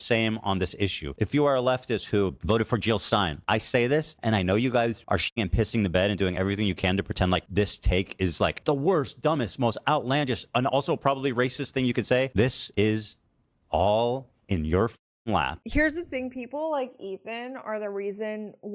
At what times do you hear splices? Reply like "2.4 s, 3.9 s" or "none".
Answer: 1.0 s, 2.4 s, 3.4 s, 4.1 s, 5.2 s, 7.5 s, 8.6 s, 12.6 s

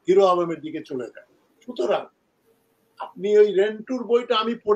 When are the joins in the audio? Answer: none

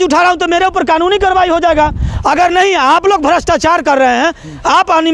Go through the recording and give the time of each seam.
none

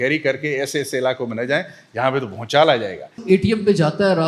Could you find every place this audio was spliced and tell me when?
3.2 s

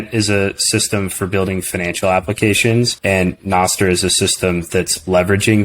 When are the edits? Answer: 3.0 s

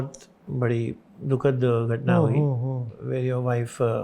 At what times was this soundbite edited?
1.1 s

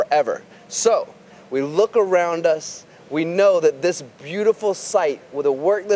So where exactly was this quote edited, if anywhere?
1.3 s

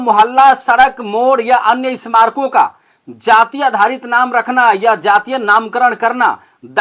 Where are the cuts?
none

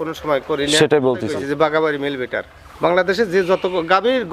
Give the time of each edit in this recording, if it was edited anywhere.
1.3 s

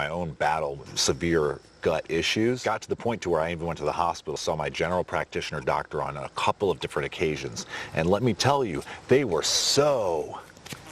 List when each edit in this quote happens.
0.9 s, 2.6 s, 4.3 s

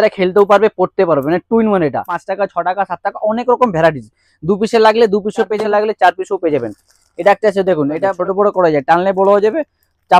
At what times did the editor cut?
2.2 s, 5.6 s, 8.1 s

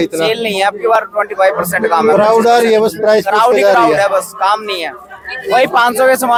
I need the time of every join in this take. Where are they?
none

